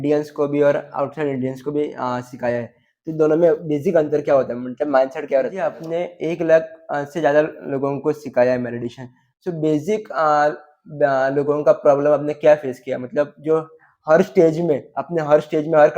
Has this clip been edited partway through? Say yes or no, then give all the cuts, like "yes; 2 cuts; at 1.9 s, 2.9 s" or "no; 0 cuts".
yes; 1 cut; at 5.8 s